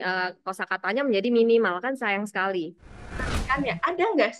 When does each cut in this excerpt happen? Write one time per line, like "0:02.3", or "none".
0:03.2

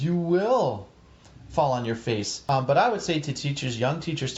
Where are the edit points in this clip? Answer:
0:02.3

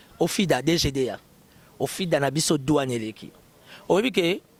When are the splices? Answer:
none

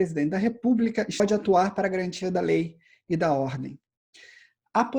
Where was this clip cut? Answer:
0:01.2

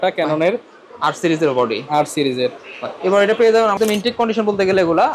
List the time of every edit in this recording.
0:03.8

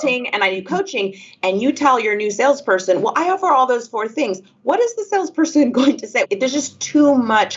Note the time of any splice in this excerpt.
0:06.3

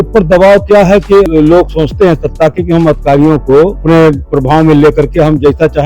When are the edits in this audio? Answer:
0:01.3
0:03.8

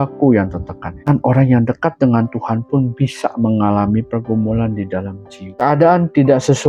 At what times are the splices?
0:01.0
0:05.4

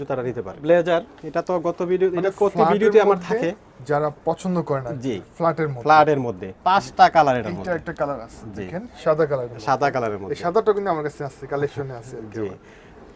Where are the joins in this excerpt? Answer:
none

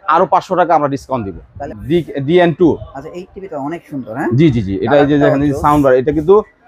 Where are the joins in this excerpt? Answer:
0:01.6

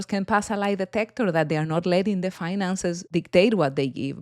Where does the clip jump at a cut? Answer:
0:03.0

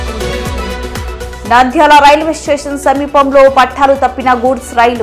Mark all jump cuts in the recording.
0:01.2

